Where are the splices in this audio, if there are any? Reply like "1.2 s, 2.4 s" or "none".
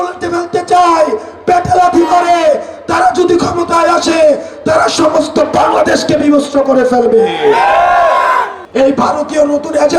8.6 s